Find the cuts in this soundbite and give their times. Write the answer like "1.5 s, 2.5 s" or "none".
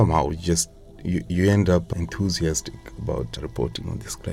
1.9 s